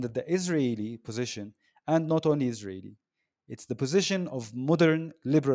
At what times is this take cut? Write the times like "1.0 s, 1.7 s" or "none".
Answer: none